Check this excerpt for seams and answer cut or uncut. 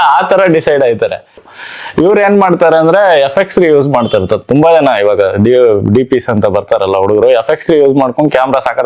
cut